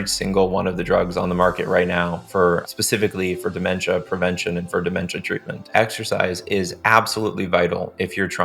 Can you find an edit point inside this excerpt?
yes; 2 cuts; at 2.6 s, 5.7 s

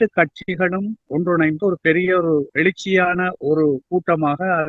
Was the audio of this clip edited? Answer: yes; 1 cut; at 1.0 s

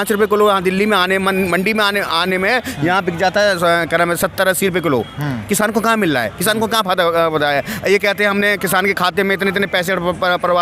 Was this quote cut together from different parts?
no; 0 cuts

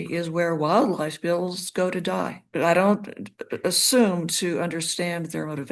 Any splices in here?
yes; 1 cut; at 2.4 s

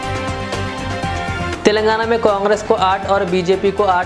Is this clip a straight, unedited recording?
yes; 0 cuts

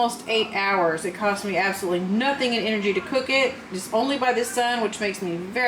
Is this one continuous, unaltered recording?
yes; 0 cuts

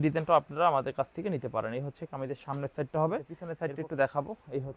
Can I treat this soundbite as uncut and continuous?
no; 1 cut; at 3.4 s

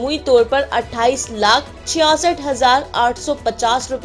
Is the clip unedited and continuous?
no; 1 cut; at 1.8 s

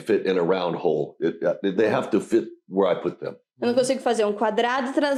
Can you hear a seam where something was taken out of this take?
no; 0 cuts

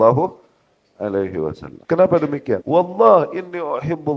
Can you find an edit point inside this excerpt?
yes; 2 cuts; at 1.7 s, 2.6 s

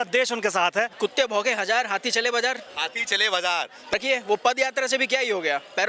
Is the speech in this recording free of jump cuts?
no; 2 cuts; at 0.9 s, 3.9 s

